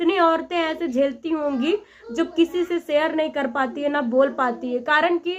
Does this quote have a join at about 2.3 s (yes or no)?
no